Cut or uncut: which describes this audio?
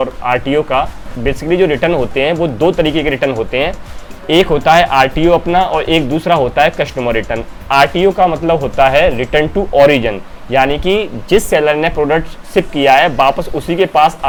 uncut